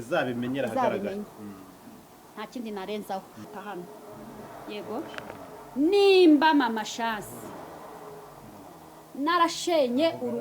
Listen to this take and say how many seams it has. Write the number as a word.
one